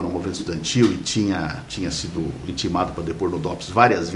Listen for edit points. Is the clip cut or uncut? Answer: uncut